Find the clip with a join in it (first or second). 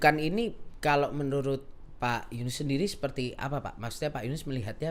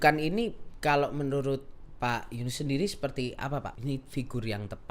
second